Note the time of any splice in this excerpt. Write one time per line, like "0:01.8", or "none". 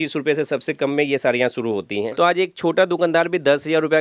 0:02.1